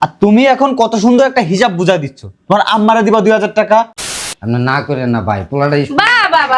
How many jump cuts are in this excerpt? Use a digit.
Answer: 1